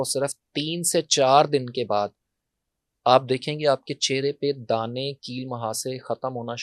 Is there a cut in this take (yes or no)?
no